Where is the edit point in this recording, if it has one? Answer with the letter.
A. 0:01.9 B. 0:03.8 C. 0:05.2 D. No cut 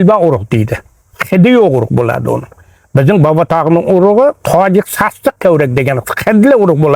D